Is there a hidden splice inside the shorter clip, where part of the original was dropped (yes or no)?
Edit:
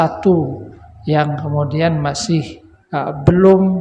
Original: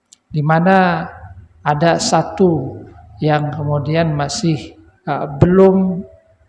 no